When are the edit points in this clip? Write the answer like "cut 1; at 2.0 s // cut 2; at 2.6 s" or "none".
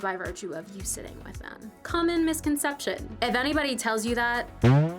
cut 1; at 3.1 s